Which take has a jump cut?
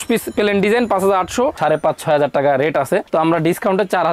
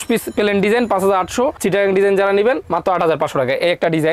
first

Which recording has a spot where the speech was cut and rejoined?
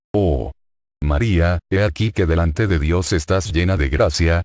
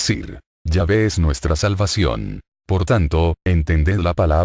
second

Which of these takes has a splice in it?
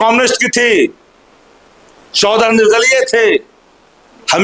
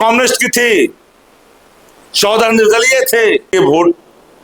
second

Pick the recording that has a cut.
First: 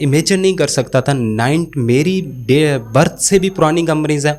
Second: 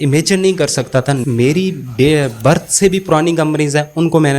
second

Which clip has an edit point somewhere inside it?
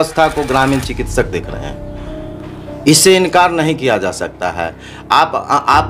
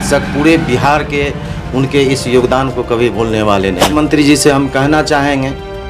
second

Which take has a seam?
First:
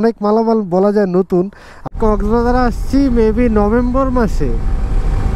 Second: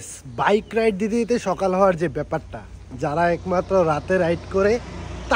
first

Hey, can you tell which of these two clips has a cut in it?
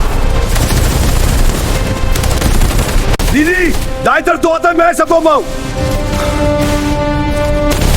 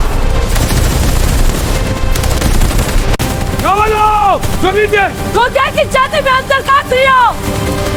first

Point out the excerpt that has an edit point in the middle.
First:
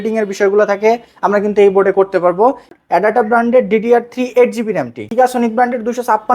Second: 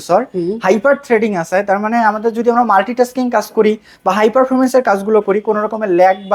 first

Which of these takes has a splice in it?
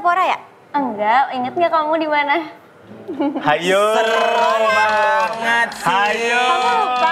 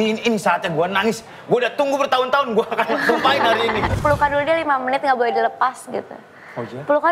second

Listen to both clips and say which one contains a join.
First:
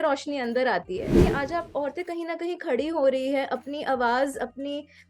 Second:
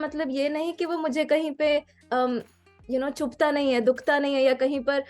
first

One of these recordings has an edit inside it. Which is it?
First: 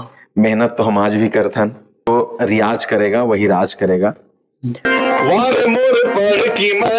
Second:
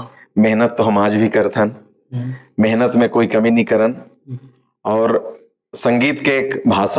first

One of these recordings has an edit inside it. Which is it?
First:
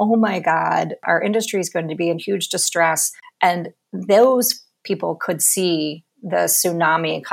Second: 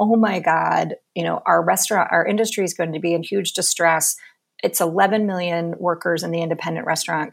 first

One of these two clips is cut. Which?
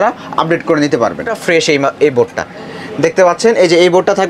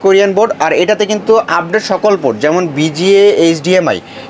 first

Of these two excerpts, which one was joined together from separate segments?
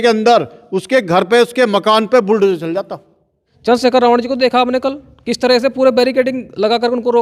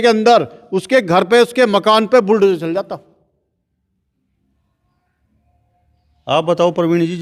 first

